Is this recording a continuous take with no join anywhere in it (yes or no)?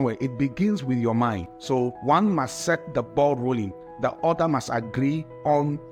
yes